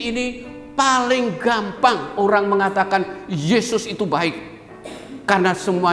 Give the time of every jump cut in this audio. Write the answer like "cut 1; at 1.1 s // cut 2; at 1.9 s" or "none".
none